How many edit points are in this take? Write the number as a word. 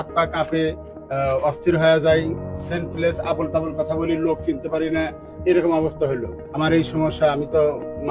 one